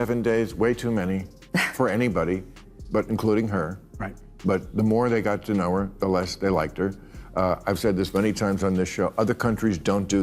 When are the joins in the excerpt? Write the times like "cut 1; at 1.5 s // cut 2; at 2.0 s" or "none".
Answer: cut 1; at 7.1 s